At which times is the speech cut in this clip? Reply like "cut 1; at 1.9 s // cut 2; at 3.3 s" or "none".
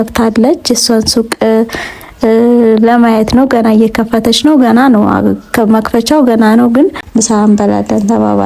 cut 1; at 7.0 s